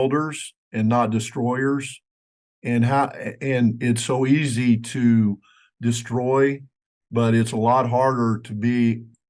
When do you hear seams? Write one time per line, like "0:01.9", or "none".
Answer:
0:06.7

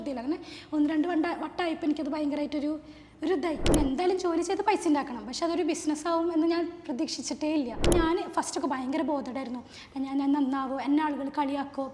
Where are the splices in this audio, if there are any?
0:03.7
0:07.9

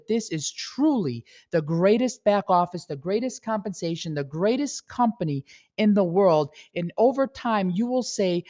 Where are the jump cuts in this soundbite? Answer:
none

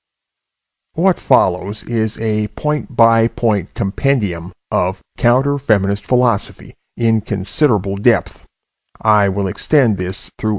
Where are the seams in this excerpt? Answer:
none

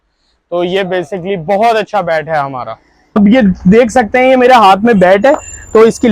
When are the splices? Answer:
0:03.2

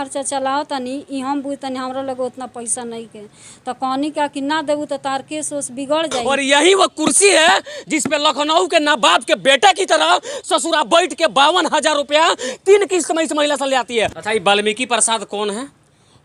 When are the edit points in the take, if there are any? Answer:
0:06.2
0:14.2

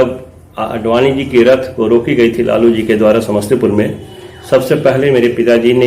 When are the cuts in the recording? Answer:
none

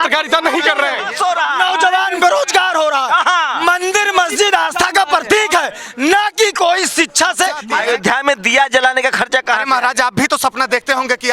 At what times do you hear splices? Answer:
0:01.1
0:07.6

